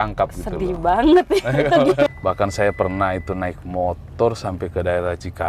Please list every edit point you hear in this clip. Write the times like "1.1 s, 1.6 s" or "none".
2.1 s